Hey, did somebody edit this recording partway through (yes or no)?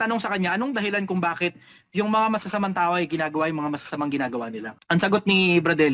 yes